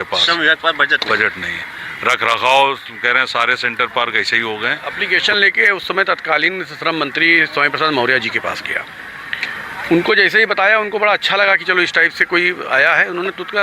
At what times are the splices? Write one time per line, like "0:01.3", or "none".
0:04.9